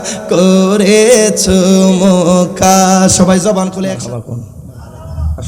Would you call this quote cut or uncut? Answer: cut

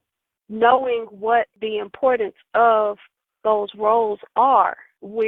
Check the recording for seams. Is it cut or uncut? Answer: cut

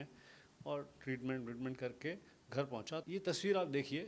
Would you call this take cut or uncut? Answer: cut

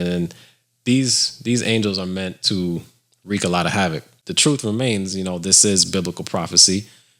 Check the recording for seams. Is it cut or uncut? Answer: cut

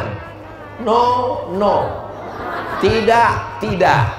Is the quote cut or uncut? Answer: uncut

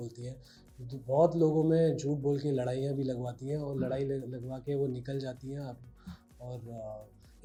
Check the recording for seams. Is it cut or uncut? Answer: uncut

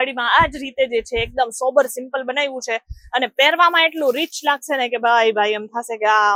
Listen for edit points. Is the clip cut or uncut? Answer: uncut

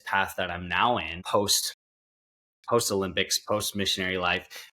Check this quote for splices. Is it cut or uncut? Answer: cut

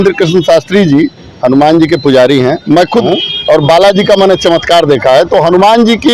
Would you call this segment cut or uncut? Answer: cut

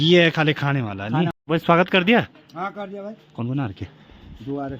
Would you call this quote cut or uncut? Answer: cut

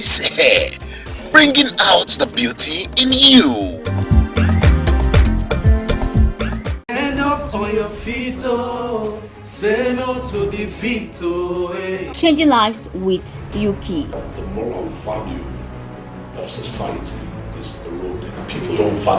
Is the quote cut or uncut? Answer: cut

